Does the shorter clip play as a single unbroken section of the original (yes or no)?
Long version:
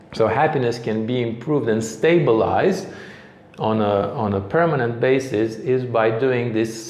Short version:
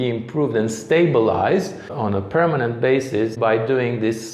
no